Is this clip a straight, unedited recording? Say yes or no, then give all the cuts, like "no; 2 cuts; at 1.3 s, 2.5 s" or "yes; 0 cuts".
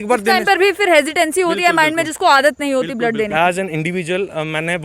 no; 1 cut; at 3.3 s